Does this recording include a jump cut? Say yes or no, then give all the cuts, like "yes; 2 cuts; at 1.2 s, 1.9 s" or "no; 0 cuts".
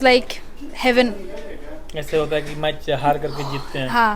no; 0 cuts